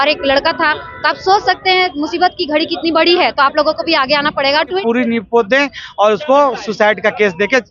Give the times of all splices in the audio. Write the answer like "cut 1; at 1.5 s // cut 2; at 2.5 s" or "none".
cut 1; at 4.8 s

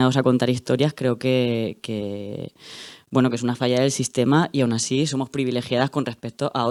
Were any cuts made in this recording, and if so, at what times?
none

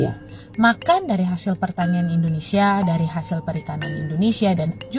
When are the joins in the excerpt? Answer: none

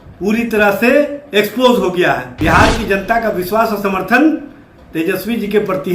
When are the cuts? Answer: cut 1; at 2.3 s

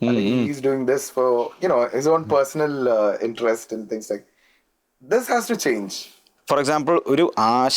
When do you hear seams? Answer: cut 1; at 6.3 s

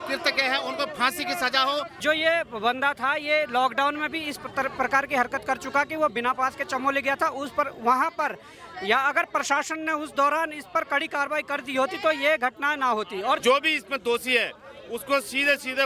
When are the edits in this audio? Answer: cut 1; at 2.0 s // cut 2; at 13.4 s

